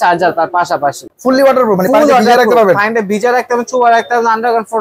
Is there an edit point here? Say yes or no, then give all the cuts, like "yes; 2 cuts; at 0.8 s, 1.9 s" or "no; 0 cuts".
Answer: yes; 1 cut; at 1.1 s